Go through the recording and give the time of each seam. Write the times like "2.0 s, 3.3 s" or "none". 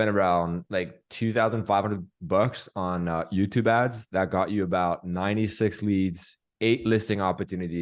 none